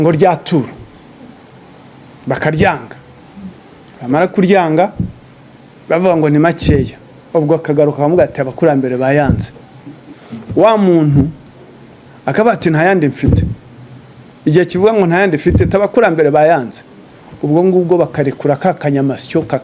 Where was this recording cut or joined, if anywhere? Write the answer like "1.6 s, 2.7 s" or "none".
none